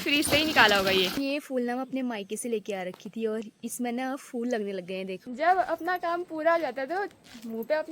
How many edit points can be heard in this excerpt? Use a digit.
2